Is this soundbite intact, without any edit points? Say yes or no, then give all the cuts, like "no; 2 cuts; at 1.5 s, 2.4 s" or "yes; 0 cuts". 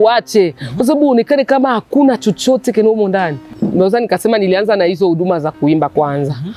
no; 1 cut; at 3.5 s